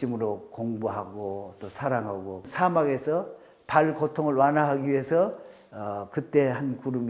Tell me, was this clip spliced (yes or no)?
yes